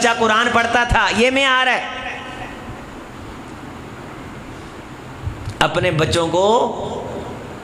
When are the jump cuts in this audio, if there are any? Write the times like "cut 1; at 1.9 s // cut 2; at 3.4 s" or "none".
none